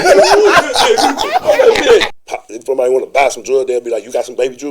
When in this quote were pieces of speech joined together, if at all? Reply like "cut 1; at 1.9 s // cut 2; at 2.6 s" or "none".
cut 1; at 2.1 s